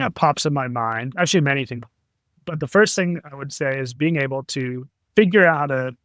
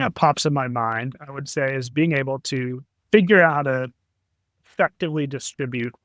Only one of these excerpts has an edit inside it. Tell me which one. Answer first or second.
second